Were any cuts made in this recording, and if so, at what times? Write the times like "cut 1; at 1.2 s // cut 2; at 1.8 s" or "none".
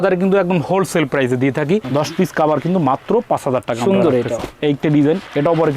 cut 1; at 1.8 s